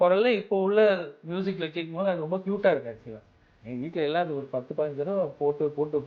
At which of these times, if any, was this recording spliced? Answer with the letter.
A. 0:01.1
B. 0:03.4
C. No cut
B